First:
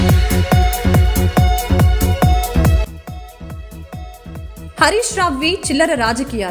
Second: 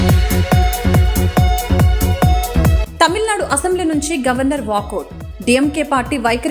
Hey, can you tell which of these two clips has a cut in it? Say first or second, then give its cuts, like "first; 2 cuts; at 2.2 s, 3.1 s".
second; 1 cut; at 2.8 s